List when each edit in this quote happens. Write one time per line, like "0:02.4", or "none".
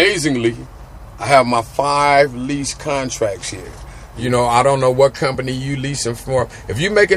0:04.2